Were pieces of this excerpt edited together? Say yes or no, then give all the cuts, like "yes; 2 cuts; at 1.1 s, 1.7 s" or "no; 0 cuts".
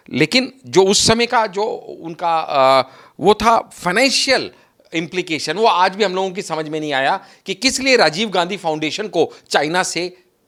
no; 0 cuts